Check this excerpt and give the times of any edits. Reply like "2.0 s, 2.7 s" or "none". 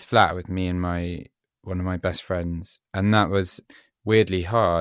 3.6 s